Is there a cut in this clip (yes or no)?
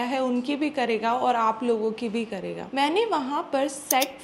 no